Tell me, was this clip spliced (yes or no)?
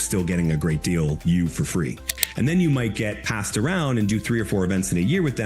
yes